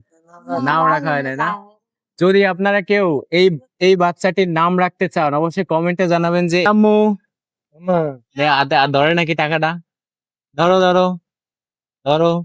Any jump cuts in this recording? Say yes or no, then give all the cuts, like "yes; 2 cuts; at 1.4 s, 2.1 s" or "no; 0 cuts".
yes; 1 cut; at 6.7 s